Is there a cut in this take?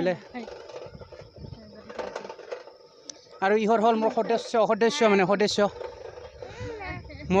no; 0 cuts

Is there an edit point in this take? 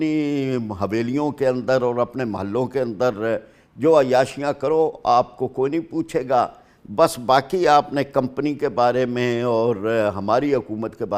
no; 0 cuts

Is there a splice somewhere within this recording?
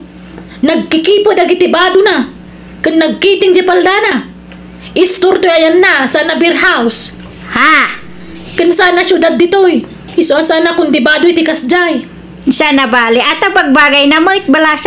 no; 0 cuts

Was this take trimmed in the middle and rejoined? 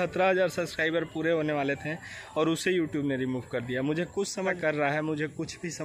yes; 1 cut; at 4.6 s

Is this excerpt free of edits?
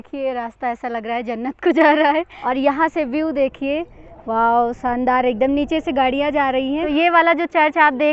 no; 2 cuts; at 2.4 s, 6.8 s

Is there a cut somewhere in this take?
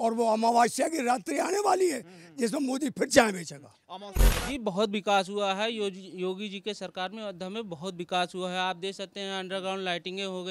yes; 1 cut; at 4.3 s

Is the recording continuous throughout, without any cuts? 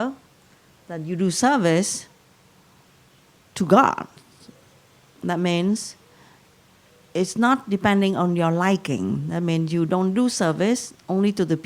yes; 0 cuts

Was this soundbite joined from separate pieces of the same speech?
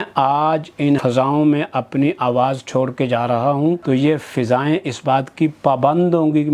yes; 2 cuts; at 1.0 s, 3.8 s

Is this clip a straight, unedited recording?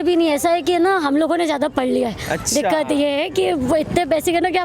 yes; 0 cuts

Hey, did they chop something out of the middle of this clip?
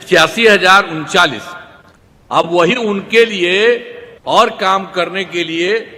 no; 0 cuts

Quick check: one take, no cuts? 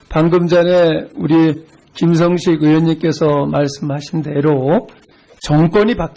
yes; 0 cuts

